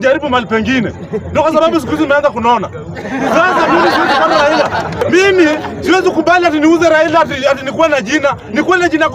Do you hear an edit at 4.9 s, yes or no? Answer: yes